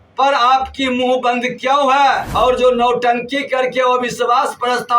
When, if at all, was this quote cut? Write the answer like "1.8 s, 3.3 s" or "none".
2.2 s